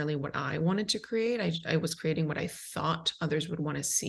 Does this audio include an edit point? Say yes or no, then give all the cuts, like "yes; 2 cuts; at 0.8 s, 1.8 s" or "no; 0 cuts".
no; 0 cuts